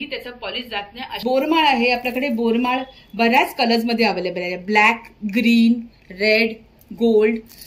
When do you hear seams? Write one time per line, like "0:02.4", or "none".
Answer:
0:01.2